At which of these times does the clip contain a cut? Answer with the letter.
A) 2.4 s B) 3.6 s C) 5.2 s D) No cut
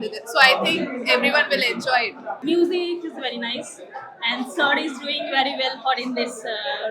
A